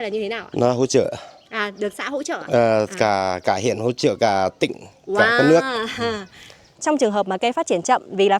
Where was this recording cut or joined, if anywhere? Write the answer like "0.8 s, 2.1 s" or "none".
6.7 s

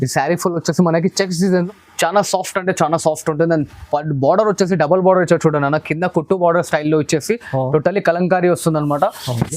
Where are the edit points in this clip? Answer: 1.6 s

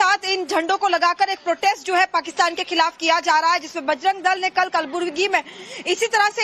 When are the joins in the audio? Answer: 4.9 s

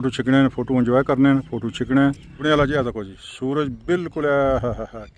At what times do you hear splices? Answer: 2.4 s

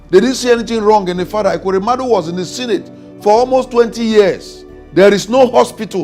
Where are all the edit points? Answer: none

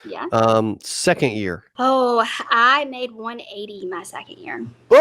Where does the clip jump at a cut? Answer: 1.6 s

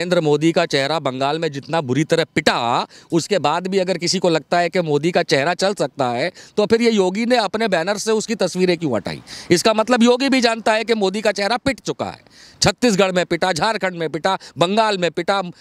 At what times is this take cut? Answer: none

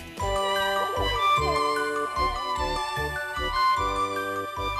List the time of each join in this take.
3.1 s

